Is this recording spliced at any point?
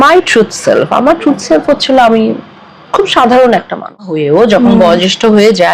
yes; 1 cut; at 4.2 s

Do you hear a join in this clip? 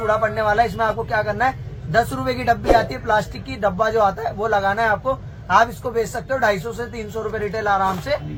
no; 0 cuts

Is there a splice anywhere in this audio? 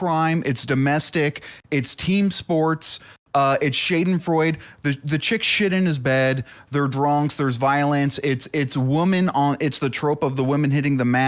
no; 0 cuts

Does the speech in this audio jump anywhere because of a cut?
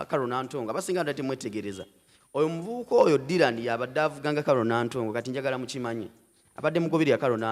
no; 0 cuts

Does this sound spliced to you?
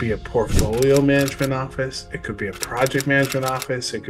no; 0 cuts

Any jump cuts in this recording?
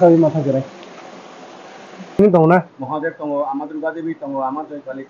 yes; 1 cut; at 2.2 s

